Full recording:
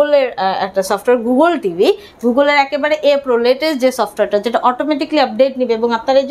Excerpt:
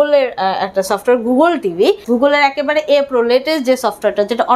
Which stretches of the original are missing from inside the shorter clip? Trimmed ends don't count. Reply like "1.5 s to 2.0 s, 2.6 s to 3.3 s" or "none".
2.0 s to 2.2 s